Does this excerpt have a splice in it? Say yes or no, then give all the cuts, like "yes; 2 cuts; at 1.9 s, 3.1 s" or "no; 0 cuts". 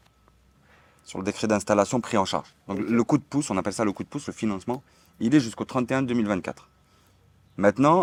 no; 0 cuts